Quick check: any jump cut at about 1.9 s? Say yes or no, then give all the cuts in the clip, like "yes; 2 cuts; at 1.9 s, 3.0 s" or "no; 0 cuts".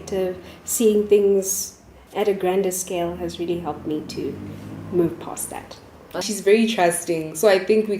no; 1 cut; at 6.3 s